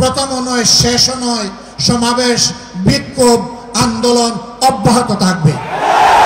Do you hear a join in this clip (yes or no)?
no